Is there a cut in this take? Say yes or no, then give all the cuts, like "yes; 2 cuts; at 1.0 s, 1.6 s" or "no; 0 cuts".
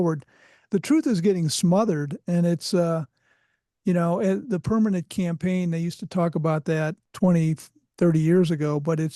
yes; 1 cut; at 7.0 s